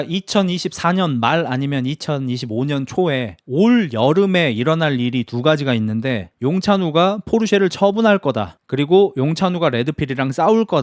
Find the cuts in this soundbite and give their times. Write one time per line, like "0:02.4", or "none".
none